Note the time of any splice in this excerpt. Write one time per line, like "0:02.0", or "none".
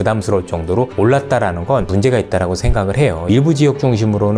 0:01.9
0:03.3